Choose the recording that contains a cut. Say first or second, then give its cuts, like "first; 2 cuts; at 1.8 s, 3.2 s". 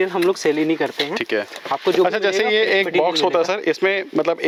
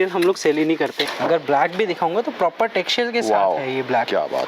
second; 1 cut; at 1.0 s